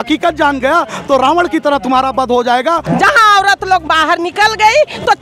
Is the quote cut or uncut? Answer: cut